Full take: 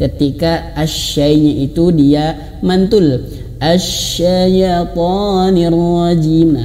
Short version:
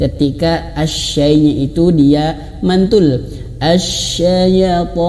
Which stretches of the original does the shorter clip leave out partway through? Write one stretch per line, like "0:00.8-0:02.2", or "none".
none

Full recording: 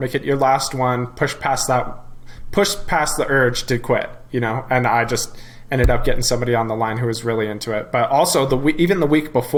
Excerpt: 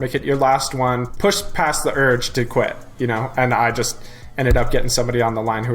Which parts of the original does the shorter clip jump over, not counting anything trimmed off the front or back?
0:01.1-0:02.4

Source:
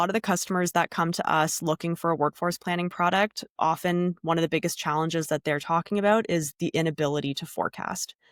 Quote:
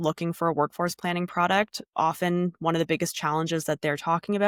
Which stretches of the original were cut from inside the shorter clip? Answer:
none

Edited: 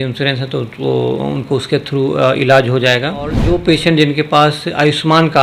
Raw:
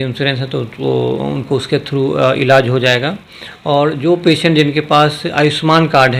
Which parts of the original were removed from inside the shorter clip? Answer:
0:03.4-0:03.9

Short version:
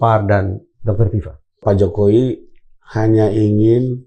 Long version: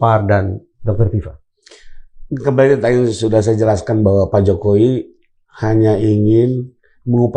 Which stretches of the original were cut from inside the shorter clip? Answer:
0:01.6-0:04.3

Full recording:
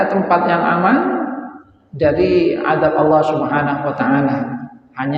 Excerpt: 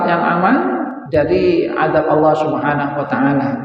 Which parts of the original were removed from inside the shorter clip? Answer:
0:01.4-0:01.8

